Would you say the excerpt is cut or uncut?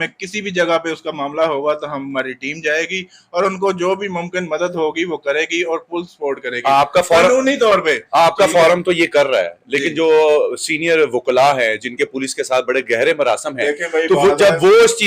uncut